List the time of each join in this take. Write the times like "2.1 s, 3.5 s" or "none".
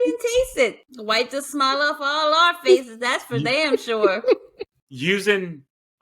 4.6 s